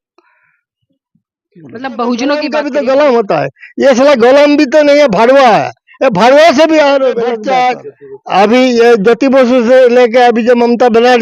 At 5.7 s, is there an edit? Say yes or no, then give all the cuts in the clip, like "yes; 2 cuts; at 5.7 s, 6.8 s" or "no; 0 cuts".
no; 2 cuts; at 2.5 s, 7.4 s